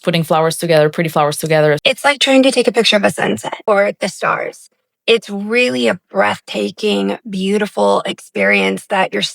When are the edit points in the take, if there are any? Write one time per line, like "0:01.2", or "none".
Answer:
0:01.8
0:03.6